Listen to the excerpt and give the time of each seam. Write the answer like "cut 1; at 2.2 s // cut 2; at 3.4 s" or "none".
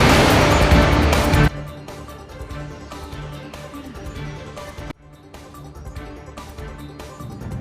cut 1; at 1.4 s